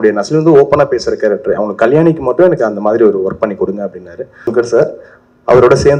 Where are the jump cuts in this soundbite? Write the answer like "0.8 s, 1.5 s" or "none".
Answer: 4.5 s